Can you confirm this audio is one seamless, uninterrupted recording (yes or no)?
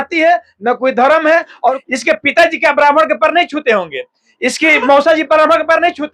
no